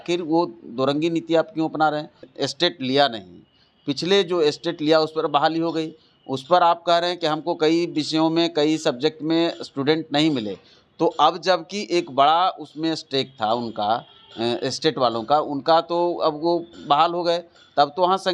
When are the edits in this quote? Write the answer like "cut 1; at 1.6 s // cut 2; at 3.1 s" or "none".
cut 1; at 2.2 s